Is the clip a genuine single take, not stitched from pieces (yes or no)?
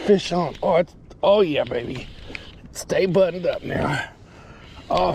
yes